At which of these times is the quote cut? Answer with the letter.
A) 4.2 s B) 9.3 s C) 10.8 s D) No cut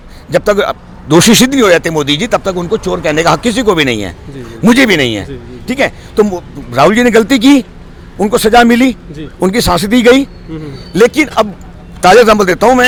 D